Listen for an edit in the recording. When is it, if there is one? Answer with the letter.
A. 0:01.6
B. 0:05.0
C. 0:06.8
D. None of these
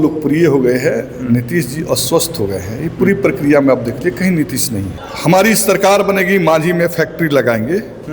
B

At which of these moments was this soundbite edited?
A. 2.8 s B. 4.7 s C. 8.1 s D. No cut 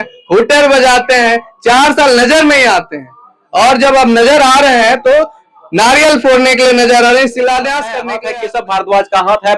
C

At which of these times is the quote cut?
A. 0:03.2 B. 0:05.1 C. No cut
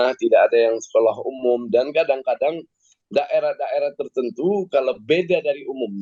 C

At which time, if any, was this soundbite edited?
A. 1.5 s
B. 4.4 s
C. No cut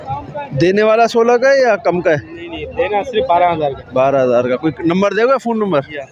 C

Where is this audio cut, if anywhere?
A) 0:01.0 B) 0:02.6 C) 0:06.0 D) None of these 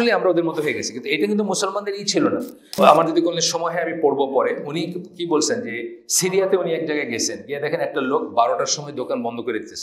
B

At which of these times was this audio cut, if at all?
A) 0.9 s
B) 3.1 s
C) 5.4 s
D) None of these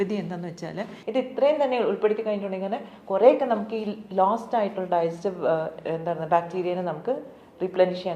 A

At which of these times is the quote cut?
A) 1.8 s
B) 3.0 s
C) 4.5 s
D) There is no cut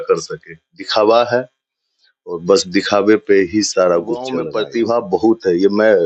C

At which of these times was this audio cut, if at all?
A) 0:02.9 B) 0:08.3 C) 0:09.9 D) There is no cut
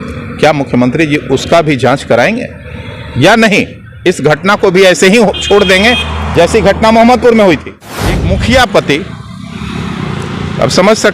B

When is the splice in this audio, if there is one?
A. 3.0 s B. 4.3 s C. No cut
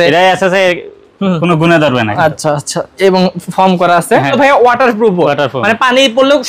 B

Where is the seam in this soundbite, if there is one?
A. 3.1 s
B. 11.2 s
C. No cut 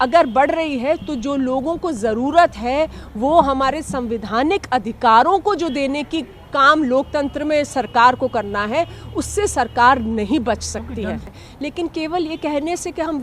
B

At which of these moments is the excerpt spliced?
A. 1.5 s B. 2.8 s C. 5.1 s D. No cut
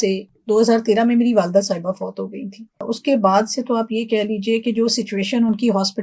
B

